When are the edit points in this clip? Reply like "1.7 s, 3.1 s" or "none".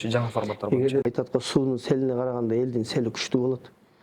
1.0 s